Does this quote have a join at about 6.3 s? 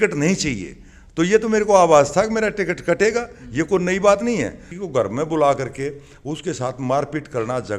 no; 1 cut; at 4.7 s

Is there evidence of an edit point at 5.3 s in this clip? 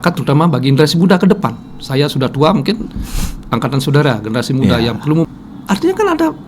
yes; 1 cut; at 5.3 s

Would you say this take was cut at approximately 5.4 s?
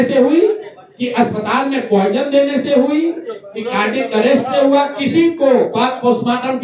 no; 0 cuts

